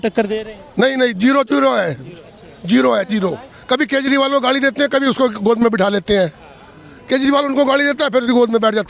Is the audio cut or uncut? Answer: cut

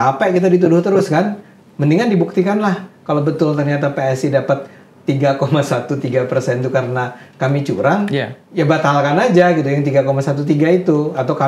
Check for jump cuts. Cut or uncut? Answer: uncut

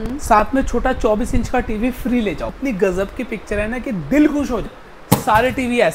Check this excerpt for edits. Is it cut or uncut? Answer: cut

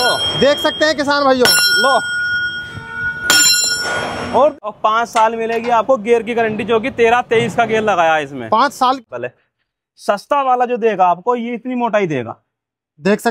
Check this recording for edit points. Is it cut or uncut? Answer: cut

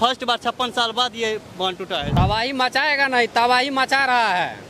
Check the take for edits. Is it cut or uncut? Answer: cut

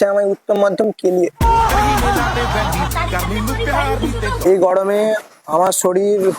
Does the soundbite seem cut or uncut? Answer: cut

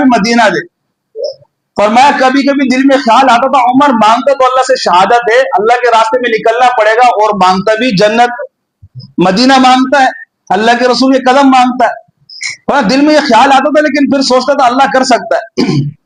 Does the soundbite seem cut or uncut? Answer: uncut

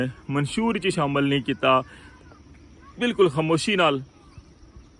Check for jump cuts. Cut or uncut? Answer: uncut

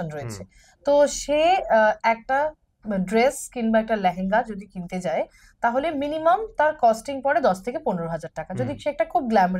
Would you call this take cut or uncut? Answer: uncut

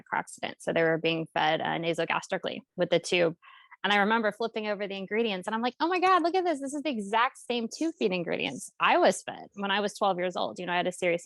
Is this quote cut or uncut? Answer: uncut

